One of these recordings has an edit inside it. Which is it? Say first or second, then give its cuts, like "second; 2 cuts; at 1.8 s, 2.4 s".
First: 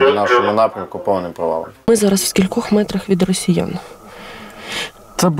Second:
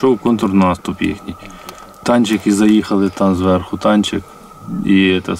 first; 1 cut; at 1.7 s